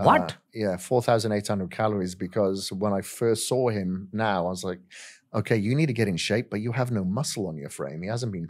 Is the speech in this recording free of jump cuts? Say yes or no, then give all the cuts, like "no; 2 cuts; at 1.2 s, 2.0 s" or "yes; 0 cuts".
yes; 0 cuts